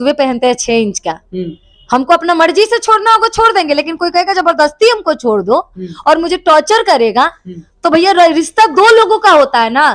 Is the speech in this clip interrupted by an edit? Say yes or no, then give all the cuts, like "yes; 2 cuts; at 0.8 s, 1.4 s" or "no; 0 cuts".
no; 0 cuts